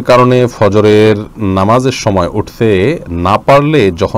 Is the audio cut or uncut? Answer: uncut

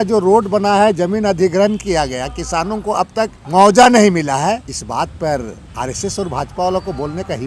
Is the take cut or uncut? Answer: cut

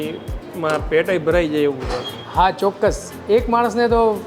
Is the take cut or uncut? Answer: uncut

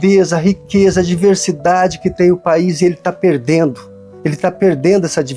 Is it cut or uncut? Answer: uncut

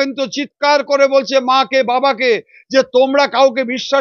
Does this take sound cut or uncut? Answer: uncut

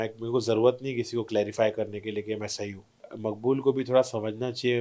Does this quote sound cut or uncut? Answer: cut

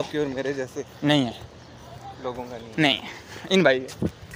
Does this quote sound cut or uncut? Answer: uncut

